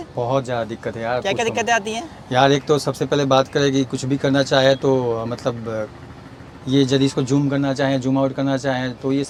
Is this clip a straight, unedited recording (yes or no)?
yes